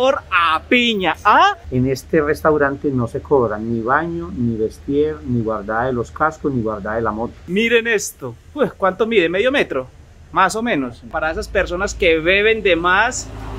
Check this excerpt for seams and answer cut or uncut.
cut